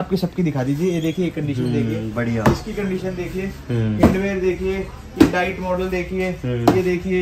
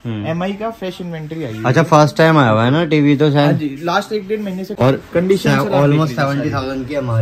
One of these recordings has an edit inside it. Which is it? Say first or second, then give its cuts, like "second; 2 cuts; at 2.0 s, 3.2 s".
second; 1 cut; at 4.7 s